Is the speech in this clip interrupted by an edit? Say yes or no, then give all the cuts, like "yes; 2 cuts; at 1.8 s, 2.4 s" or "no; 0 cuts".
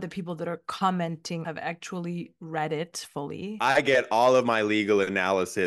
yes; 2 cuts; at 1.4 s, 3.5 s